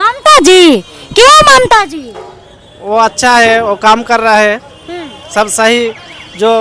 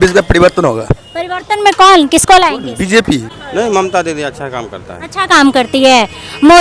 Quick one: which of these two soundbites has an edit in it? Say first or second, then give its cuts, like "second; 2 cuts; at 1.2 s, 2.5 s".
second; 1 cut; at 3.3 s